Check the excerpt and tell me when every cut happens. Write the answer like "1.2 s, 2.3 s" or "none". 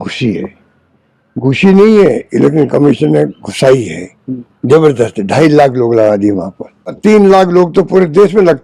6.9 s